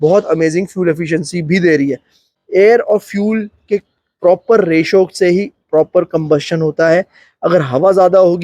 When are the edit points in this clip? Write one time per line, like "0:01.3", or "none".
0:02.3